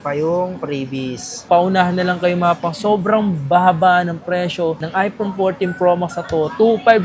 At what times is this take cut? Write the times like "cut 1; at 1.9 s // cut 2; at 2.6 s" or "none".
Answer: cut 1; at 1.5 s